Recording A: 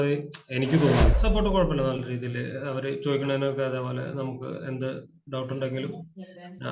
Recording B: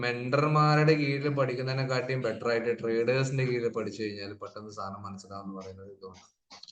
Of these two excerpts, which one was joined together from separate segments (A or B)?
A